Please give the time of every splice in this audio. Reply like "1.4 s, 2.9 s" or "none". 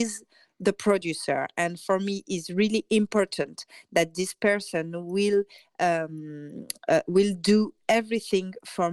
none